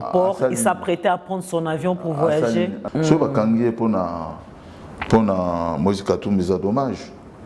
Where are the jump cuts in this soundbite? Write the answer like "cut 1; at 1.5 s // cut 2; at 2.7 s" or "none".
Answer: cut 1; at 2.8 s